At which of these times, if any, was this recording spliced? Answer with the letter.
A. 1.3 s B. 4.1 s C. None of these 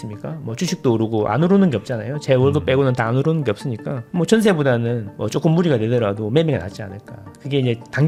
C